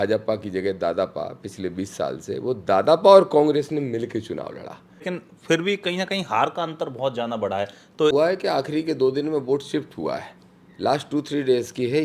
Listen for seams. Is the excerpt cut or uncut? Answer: cut